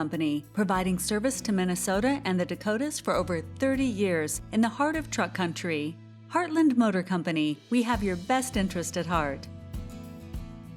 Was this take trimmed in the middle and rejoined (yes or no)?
yes